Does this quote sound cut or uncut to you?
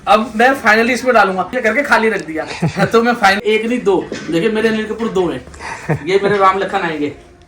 cut